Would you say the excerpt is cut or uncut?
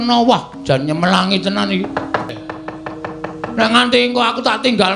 cut